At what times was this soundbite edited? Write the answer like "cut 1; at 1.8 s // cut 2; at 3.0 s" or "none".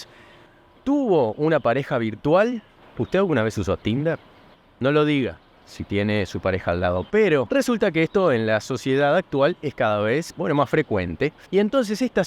cut 1; at 7.5 s // cut 2; at 10.3 s // cut 3; at 11.4 s